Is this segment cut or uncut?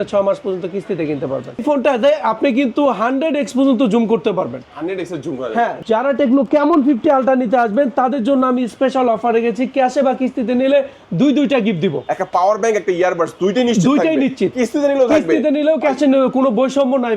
cut